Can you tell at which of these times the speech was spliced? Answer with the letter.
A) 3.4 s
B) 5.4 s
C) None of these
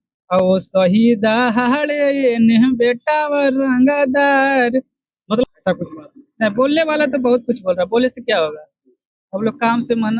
B